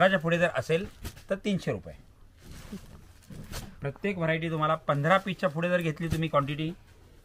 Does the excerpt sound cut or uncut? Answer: uncut